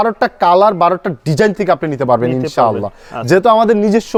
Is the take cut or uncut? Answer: uncut